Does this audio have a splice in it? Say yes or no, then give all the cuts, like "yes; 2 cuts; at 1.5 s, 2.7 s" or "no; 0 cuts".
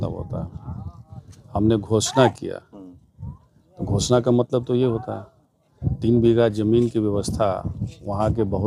no; 0 cuts